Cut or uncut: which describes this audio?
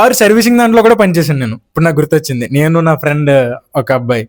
uncut